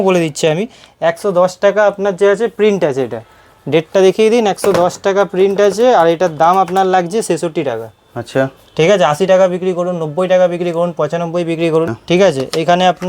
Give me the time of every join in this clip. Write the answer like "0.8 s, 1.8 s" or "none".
11.9 s

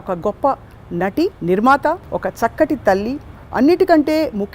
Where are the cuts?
1.4 s, 2.1 s

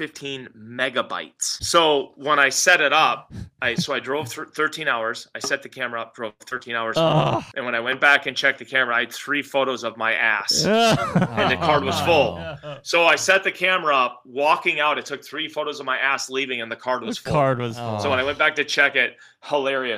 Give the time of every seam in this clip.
1.5 s, 7.5 s

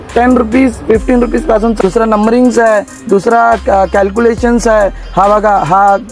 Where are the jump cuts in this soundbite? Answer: 1.8 s

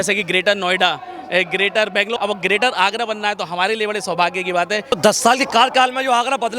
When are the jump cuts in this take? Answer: 2.2 s, 4.9 s

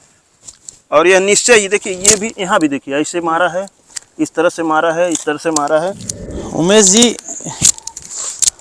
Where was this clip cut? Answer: 5.8 s

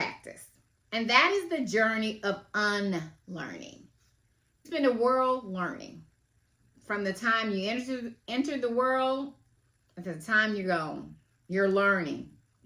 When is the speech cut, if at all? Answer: 4.7 s

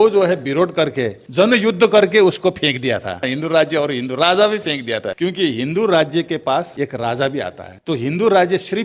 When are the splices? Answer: 1.1 s, 3.3 s, 5.1 s, 6.7 s, 7.7 s

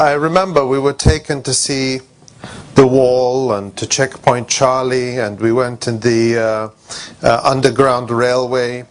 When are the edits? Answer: 3.8 s

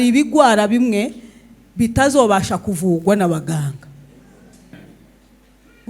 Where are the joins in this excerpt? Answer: 4.7 s

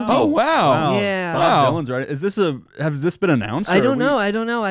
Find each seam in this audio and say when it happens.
none

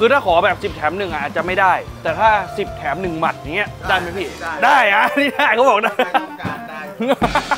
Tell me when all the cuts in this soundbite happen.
none

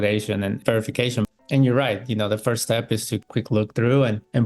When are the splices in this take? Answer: 1.3 s

